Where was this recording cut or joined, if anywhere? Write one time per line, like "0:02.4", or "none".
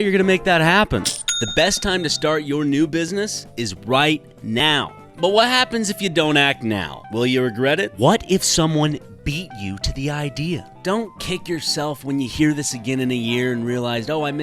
0:05.0